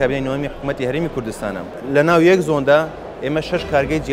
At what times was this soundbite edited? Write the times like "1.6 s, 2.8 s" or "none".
1.8 s